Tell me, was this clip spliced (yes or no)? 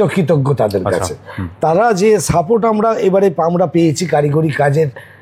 no